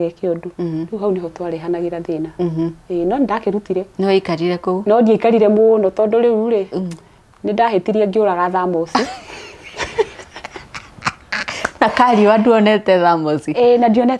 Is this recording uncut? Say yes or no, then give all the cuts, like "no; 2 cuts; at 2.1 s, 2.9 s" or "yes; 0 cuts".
yes; 0 cuts